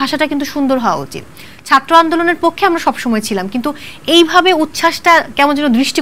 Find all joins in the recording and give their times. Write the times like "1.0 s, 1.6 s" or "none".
none